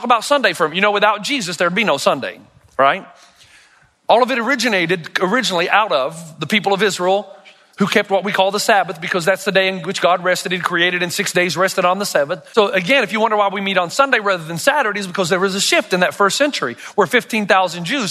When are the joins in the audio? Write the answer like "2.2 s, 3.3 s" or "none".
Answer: 12.4 s